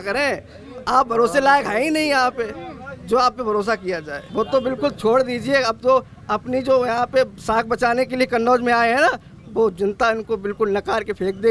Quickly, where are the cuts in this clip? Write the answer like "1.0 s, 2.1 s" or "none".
4.2 s